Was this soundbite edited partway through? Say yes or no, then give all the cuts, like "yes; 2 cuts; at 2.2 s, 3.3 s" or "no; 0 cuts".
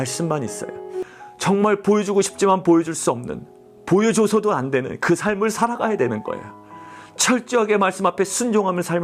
yes; 1 cut; at 1.0 s